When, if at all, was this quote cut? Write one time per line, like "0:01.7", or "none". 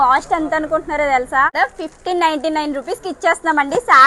0:01.5